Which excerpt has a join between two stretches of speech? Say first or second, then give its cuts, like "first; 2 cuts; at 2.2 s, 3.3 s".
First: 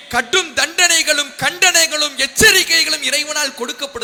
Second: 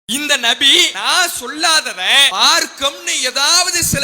second; 2 cuts; at 0.9 s, 2.3 s